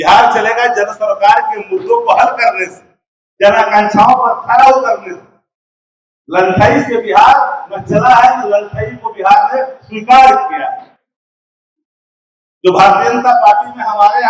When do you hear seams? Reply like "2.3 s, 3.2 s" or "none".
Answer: none